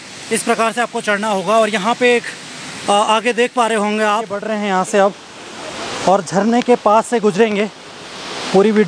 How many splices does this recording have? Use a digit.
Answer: 1